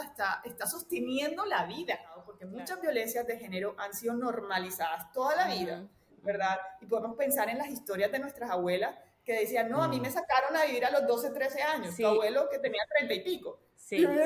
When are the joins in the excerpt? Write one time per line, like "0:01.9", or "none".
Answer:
0:02.4